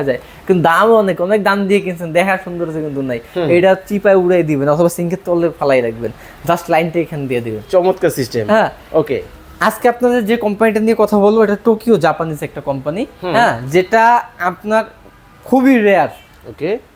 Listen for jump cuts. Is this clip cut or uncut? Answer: uncut